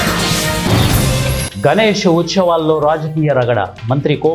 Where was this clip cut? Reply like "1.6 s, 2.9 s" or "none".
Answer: 1.4 s